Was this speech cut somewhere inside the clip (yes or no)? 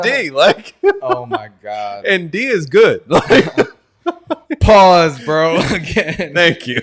no